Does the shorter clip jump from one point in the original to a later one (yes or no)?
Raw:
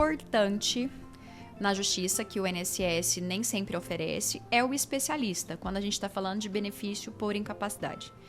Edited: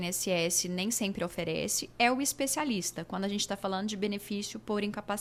no